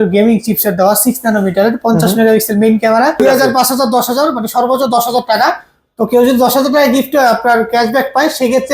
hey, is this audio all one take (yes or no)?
no